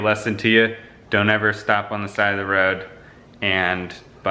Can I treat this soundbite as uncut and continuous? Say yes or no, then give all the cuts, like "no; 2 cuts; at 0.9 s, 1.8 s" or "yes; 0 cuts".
yes; 0 cuts